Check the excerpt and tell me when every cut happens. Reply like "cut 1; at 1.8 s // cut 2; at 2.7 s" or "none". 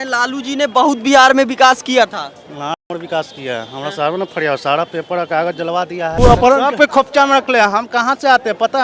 cut 1; at 6.2 s